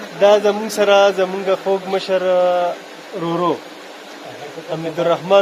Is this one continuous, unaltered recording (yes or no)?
yes